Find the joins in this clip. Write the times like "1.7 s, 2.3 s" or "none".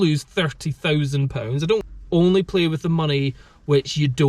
1.8 s